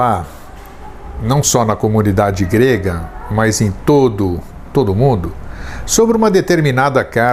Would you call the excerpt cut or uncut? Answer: uncut